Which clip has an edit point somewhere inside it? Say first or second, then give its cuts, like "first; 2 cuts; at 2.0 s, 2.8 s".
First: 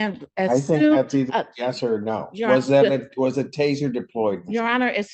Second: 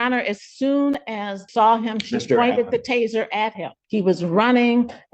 second; 2 cuts; at 1.4 s, 3.8 s